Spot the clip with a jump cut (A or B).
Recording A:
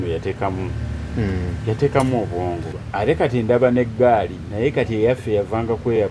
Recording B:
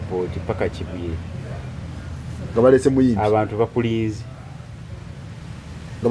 A